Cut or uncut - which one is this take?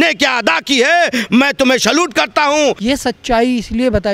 cut